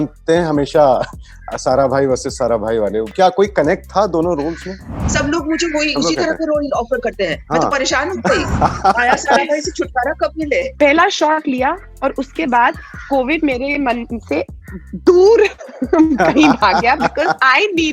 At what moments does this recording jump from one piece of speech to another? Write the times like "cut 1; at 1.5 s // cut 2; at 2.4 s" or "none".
cut 1; at 3.1 s // cut 2; at 5.0 s // cut 3; at 10.7 s